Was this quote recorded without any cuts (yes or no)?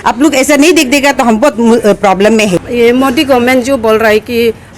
no